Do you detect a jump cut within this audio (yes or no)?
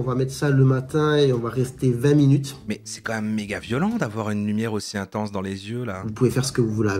yes